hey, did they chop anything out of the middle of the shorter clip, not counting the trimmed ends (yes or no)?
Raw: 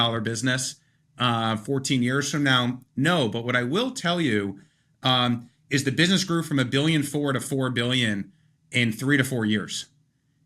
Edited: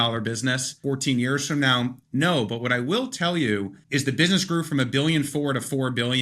yes